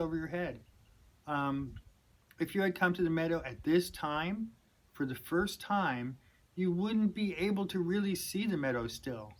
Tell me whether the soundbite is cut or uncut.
uncut